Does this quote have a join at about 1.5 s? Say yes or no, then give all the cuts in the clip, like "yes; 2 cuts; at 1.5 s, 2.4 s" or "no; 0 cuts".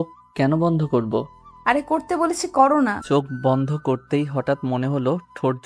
no; 1 cut; at 3.0 s